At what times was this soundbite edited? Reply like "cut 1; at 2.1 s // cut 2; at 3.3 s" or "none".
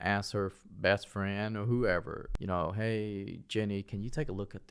cut 1; at 2.3 s